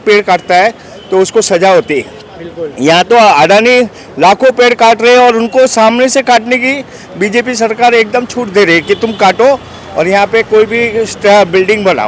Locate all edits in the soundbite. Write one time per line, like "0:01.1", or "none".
none